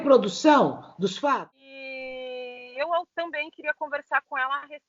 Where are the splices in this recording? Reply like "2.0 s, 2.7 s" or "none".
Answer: 1.4 s

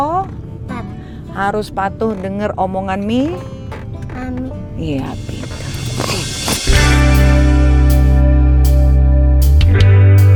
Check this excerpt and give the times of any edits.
none

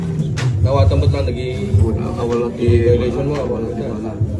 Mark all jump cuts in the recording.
none

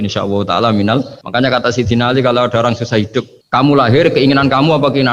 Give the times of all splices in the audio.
1.2 s, 3.4 s

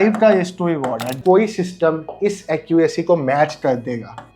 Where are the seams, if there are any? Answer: 1.2 s

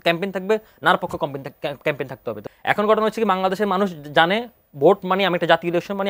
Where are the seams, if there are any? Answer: 2.4 s

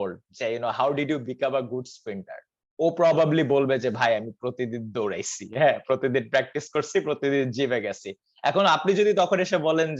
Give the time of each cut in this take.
none

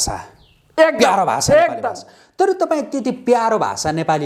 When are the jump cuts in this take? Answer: none

